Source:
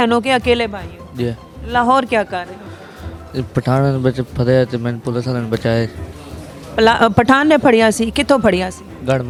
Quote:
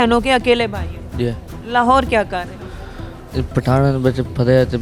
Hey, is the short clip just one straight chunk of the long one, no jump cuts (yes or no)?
yes